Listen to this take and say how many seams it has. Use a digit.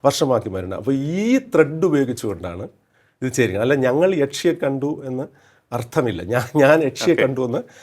0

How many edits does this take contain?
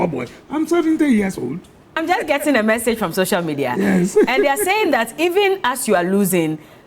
1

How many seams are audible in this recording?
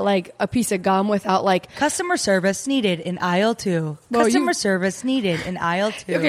1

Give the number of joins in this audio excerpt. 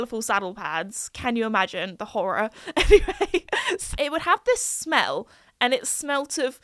1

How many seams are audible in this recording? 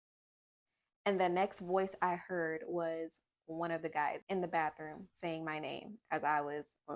0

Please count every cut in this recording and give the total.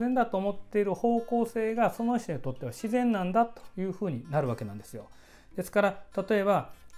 0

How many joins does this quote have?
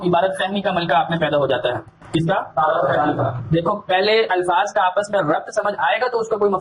0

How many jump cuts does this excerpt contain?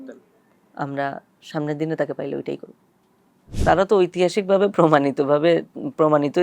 1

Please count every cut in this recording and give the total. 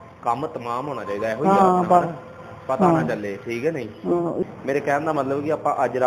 1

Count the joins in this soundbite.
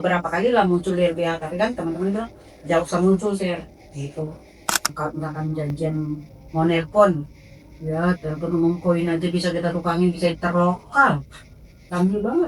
1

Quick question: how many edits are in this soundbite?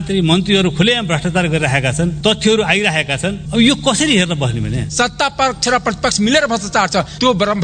3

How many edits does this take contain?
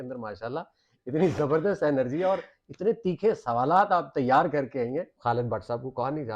1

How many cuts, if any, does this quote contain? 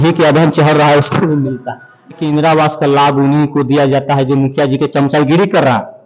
1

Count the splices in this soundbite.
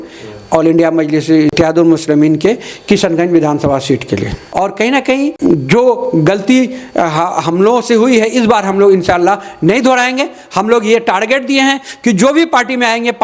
3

